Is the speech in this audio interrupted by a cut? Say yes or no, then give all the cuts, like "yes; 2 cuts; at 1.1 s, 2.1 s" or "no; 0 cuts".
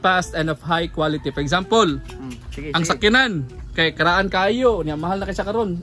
no; 0 cuts